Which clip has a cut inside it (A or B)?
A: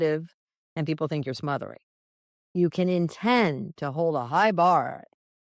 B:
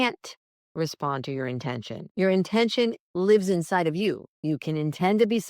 B